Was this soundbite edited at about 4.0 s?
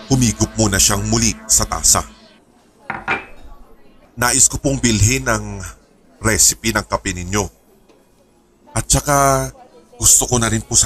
yes; 1 cut; at 4.0 s

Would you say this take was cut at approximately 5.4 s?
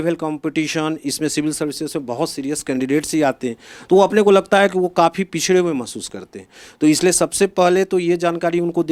no; 0 cuts

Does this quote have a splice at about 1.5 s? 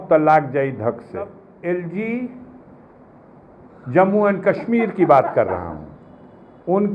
yes; 1 cut; at 1.5 s

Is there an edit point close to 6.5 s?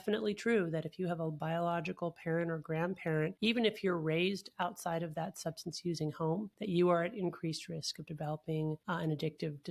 yes; 3 cuts; at 3.3 s, 6.5 s, 8.8 s

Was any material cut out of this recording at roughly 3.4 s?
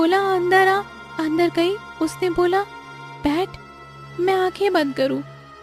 no; 2 cuts; at 1.0 s, 1.9 s

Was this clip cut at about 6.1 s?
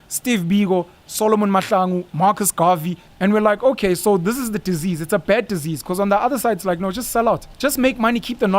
no; 2 cuts; at 3.0 s, 7.5 s

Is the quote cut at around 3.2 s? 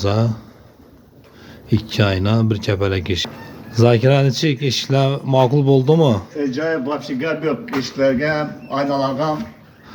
yes; 1 cut; at 3.2 s

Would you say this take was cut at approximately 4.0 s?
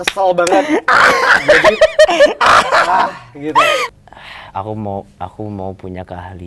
yes; 1 cut; at 4.0 s

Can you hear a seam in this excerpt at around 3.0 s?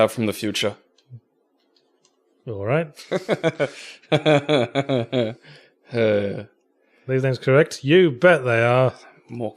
yes; 1 cut; at 3.0 s

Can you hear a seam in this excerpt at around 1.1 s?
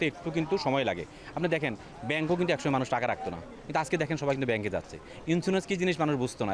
no; 0 cuts

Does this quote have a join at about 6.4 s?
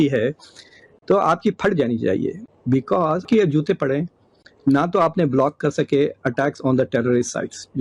no; 1 cut; at 3.3 s

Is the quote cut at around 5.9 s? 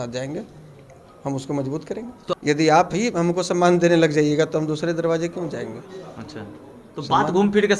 no; 1 cut; at 2.3 s

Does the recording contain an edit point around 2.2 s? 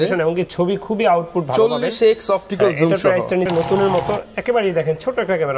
no; 1 cut; at 3.5 s

